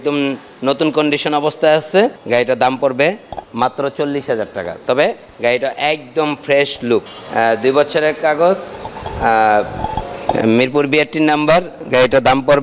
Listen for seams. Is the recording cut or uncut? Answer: cut